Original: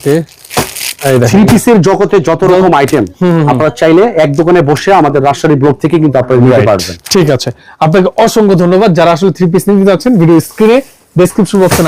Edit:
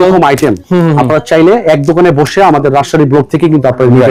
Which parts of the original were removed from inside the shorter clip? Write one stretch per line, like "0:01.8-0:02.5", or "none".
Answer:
none